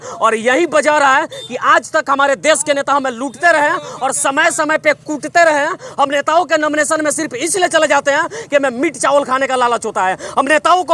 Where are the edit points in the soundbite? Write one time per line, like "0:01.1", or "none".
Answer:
none